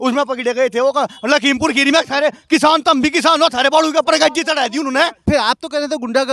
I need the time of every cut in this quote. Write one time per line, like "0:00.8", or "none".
0:05.2